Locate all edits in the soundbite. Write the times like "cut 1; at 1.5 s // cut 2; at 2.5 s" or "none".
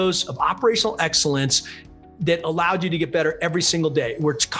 none